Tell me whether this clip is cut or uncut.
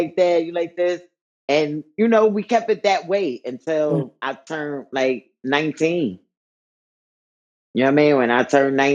uncut